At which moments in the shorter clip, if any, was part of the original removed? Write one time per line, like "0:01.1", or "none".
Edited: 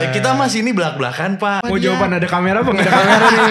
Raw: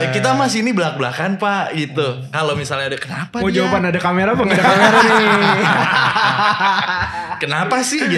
0:01.6